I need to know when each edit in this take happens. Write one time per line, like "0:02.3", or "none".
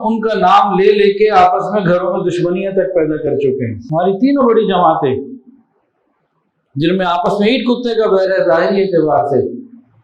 0:03.8